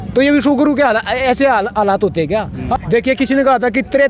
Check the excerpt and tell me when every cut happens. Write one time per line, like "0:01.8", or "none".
0:02.7